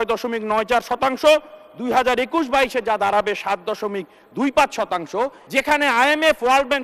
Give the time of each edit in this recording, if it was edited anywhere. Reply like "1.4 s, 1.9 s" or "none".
5.4 s